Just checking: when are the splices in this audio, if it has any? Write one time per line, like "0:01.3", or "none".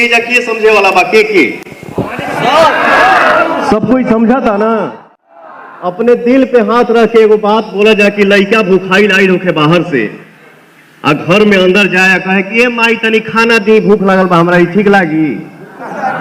none

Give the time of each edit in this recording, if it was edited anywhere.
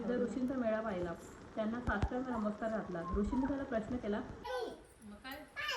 0:04.5

